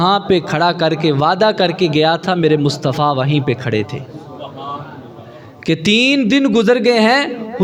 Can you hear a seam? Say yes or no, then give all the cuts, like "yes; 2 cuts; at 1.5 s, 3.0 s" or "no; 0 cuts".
no; 0 cuts